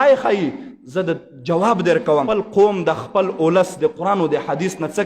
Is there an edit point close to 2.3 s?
yes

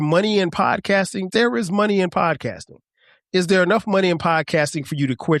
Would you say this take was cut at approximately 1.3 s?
yes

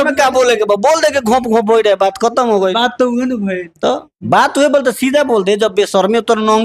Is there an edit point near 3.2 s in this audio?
no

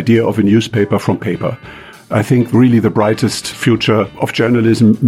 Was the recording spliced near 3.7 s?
yes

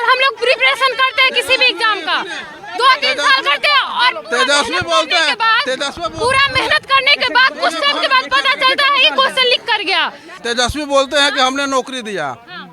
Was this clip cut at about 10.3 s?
yes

